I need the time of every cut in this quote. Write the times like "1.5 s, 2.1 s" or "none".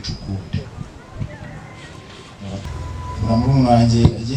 2.6 s